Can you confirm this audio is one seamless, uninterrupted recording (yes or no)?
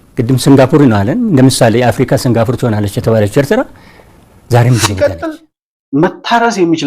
no